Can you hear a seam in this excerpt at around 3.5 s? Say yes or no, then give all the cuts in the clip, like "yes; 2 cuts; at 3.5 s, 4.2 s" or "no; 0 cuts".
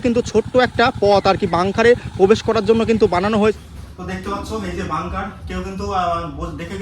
yes; 1 cut; at 3.5 s